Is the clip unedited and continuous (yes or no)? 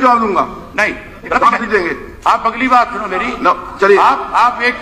yes